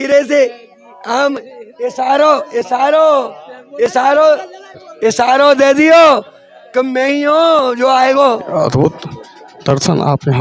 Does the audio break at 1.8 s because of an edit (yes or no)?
no